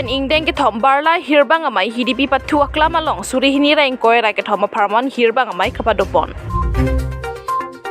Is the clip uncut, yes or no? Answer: no